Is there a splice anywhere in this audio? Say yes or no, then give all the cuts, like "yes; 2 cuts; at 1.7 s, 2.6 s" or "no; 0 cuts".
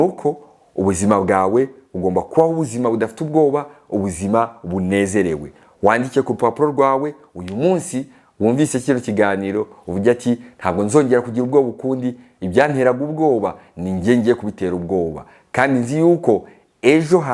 no; 0 cuts